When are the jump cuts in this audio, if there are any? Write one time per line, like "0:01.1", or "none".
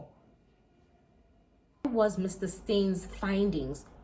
0:01.8